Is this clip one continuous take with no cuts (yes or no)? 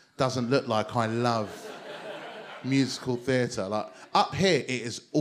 yes